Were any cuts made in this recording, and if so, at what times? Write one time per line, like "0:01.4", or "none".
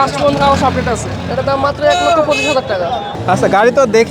0:01.2
0:03.1